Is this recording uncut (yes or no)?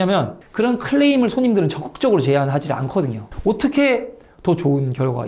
no